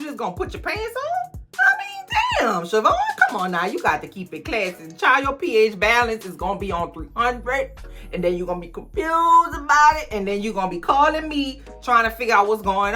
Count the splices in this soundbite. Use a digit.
1